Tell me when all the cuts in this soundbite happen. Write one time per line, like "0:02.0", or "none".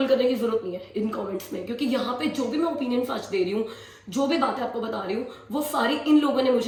none

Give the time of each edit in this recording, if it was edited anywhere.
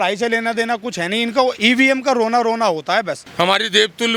0:01.6
0:03.2

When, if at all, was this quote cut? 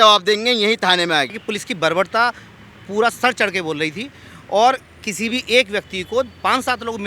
0:01.4

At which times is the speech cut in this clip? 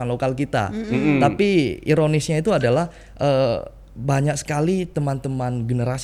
none

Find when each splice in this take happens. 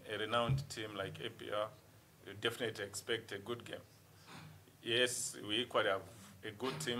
none

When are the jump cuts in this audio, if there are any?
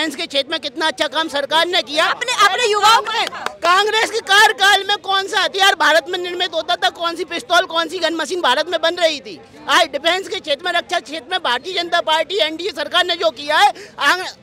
none

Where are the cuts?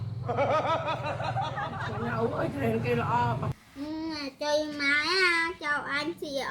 0:03.5

